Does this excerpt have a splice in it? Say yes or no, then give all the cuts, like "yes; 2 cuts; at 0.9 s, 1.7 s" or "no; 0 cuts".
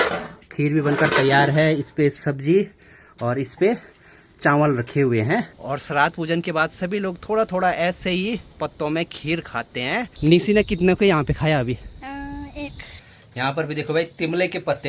yes; 3 cuts; at 5.6 s, 10.1 s, 13.0 s